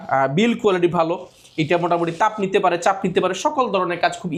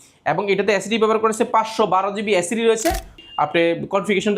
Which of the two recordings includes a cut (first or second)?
second